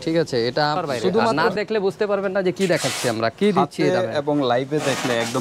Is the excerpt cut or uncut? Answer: cut